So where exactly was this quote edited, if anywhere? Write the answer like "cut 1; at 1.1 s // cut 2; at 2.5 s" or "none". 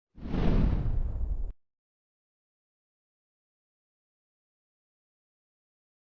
none